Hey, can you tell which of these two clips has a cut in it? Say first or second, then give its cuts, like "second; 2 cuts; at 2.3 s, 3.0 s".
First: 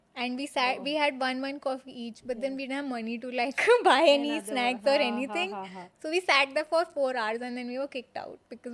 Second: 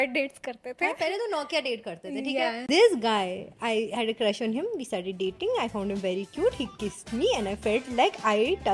second; 1 cut; at 2.6 s